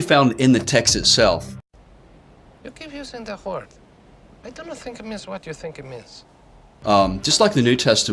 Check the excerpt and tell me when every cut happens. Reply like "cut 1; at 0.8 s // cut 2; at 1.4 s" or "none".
cut 1; at 1.6 s